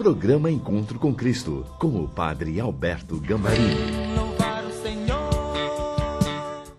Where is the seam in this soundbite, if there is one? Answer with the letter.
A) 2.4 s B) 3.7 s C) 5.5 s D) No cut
B